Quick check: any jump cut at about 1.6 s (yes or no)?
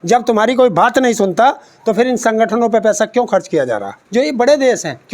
no